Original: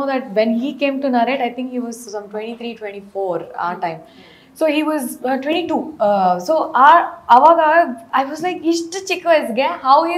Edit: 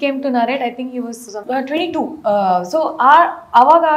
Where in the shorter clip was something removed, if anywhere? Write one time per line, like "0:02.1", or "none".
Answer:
0:01.4